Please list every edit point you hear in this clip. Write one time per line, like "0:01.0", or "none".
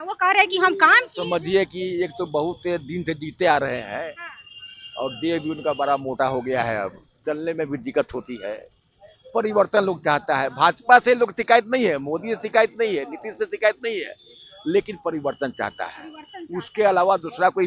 none